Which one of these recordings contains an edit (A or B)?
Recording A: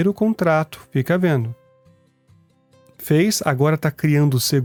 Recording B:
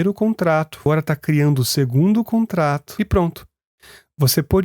B